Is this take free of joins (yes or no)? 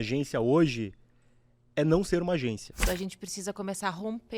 no